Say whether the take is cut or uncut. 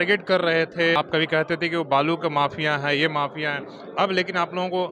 cut